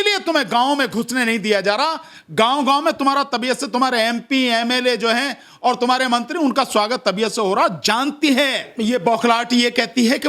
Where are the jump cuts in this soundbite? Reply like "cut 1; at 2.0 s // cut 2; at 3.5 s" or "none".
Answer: cut 1; at 8.7 s